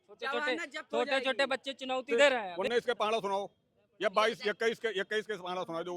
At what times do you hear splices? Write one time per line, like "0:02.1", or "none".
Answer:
0:02.5

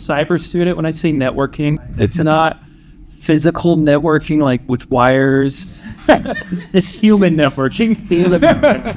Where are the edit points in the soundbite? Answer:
none

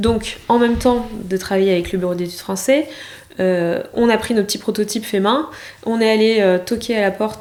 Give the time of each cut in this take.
none

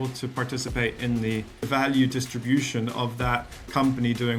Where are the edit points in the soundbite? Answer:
0:01.7

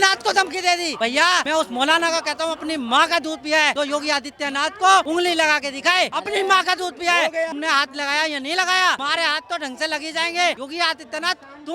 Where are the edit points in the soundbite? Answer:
0:01.2
0:03.7
0:05.1
0:06.2
0:07.5
0:09.0
0:10.6

